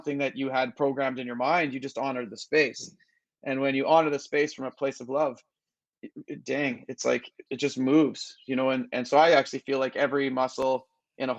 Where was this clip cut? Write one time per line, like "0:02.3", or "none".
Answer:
0:07.4